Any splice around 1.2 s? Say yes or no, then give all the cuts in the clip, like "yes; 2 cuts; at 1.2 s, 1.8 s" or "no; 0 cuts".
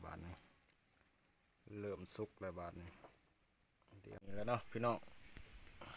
no; 1 cut; at 4.2 s